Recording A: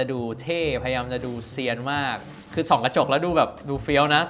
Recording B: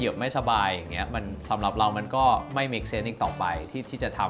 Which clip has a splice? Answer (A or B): A